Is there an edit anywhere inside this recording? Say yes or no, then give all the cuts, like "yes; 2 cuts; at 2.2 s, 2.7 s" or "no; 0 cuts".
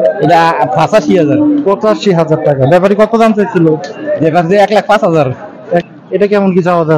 yes; 1 cut; at 5.8 s